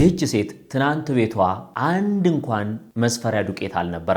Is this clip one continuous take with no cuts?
no; 2 cuts; at 1.7 s, 2.8 s

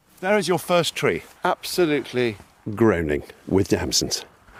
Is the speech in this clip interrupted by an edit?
no; 0 cuts

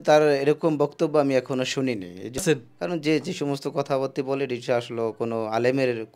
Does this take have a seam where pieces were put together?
yes; 1 cut; at 2.4 s

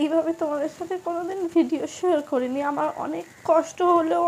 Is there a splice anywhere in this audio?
no; 0 cuts

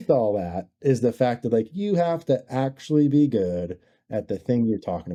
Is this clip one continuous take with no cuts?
yes; 0 cuts

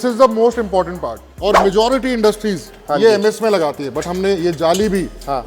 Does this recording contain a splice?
yes; 1 cut; at 1.4 s

